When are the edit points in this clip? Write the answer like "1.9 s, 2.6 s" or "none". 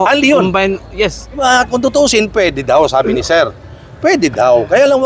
1.4 s